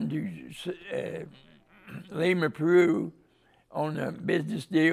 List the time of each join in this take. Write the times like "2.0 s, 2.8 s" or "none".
none